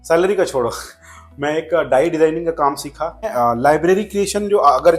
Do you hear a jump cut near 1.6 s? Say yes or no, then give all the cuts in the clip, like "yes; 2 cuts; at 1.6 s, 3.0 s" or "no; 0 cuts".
no; 1 cut; at 3.3 s